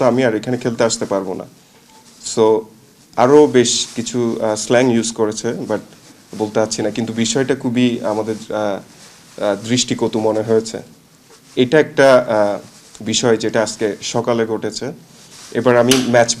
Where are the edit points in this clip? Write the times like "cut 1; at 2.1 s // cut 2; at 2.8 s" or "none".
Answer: none